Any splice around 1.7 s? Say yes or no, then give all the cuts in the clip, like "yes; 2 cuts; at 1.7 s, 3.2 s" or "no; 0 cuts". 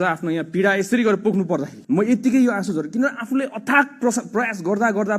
yes; 1 cut; at 1.7 s